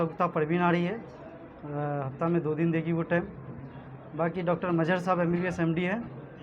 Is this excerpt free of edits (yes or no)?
yes